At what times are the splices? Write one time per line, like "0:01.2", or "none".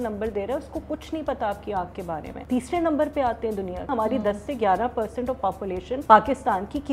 0:02.3
0:03.8
0:05.9

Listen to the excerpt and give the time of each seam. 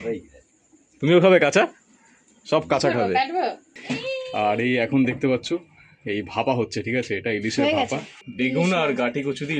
0:03.6
0:08.2

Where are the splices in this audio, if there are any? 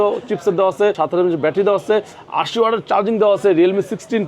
0:01.0

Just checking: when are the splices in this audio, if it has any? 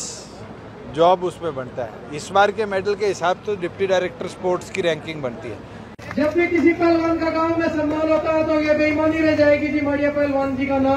0:06.0

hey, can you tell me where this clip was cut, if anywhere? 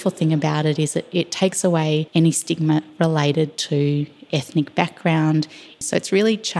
0:02.1
0:05.8

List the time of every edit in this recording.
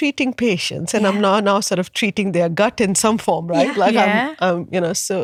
none

